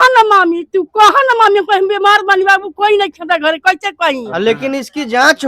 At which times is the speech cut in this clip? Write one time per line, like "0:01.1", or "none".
0:04.5